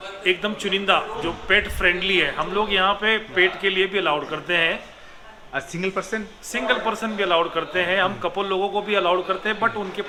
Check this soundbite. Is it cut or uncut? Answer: uncut